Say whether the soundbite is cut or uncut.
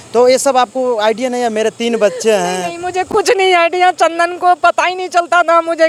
uncut